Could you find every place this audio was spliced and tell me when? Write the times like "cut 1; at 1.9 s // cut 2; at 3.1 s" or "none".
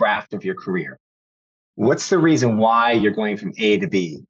none